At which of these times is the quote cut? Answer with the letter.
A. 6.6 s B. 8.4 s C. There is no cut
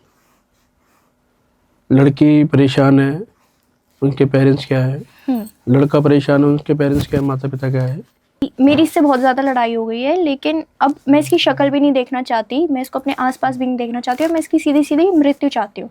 B